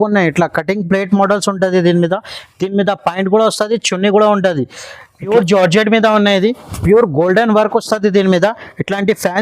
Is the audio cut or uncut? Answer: cut